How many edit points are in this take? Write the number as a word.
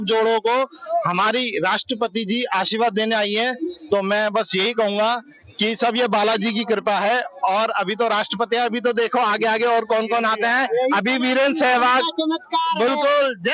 zero